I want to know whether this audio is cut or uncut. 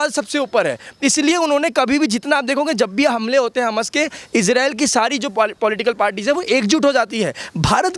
uncut